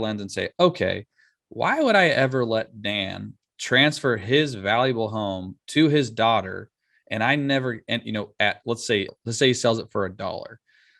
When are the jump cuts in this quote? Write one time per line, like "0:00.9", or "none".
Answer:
0:09.1